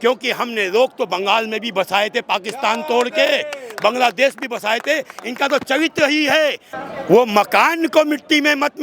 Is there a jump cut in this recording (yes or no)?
yes